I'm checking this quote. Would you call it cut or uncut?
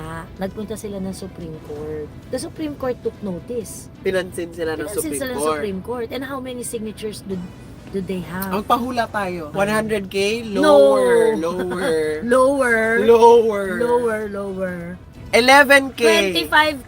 cut